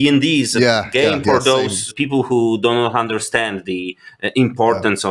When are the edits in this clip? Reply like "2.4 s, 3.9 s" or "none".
none